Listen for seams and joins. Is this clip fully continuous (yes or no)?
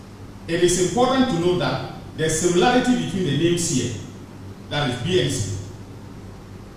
yes